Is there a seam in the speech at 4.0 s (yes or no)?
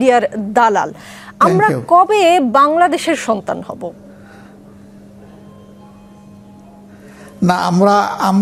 no